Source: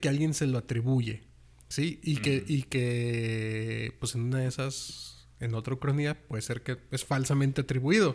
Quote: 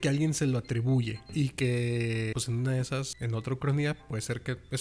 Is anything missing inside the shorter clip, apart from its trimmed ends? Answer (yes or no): yes